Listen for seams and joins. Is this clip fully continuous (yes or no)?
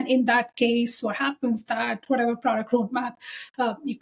yes